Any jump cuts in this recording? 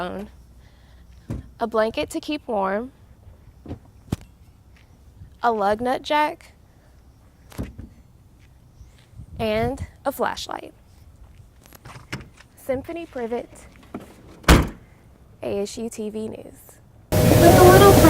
yes; 1 cut; at 17.0 s

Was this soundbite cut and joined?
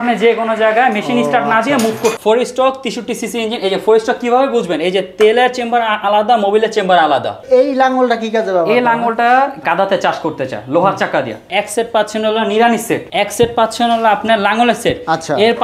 yes; 3 cuts; at 2.2 s, 7.4 s, 11.4 s

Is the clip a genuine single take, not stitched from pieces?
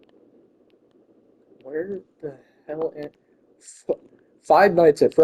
yes; 0 cuts

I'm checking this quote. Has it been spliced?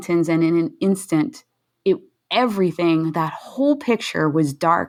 no; 0 cuts

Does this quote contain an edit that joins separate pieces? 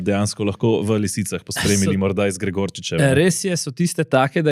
no; 0 cuts

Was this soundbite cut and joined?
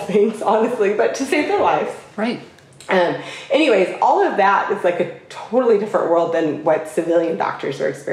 no; 0 cuts

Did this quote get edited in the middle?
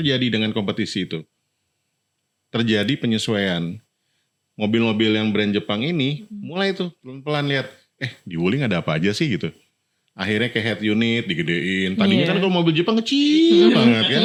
no; 0 cuts

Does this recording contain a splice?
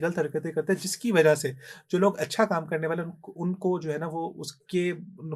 no; 0 cuts

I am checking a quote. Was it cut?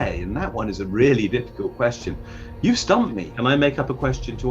yes; 1 cut; at 3.2 s

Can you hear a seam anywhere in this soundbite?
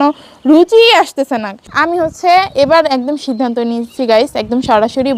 yes; 1 cut; at 1.6 s

